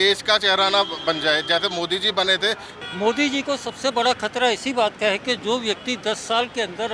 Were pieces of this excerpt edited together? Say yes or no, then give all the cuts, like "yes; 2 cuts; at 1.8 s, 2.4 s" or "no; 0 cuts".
yes; 1 cut; at 2.7 s